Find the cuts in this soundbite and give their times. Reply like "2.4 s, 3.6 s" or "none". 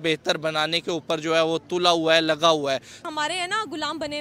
3.0 s